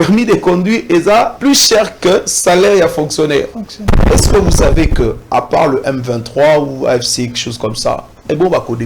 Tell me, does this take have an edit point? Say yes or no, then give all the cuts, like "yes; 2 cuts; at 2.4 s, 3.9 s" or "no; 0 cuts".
yes; 2 cuts; at 1.3 s, 3.9 s